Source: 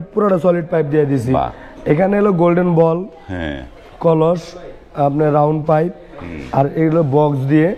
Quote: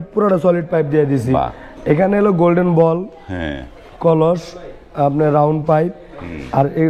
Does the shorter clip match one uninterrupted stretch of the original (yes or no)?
yes